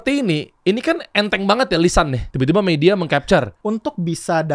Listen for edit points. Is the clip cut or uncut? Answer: cut